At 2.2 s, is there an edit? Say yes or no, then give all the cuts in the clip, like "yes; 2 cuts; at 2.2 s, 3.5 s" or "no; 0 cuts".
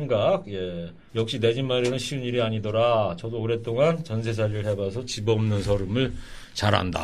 yes; 1 cut; at 2.2 s